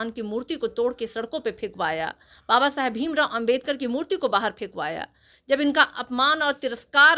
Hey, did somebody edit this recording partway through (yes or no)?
no